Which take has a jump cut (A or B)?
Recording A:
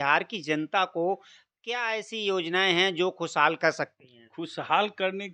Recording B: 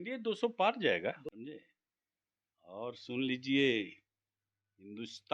B